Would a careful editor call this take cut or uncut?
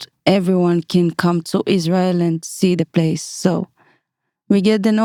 uncut